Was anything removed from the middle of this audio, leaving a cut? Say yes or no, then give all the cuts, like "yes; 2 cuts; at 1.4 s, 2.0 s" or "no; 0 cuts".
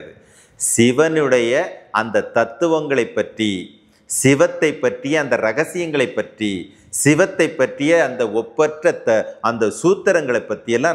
no; 0 cuts